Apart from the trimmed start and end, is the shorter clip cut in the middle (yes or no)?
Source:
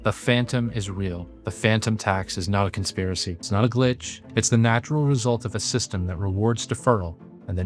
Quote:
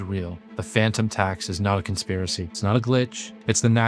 no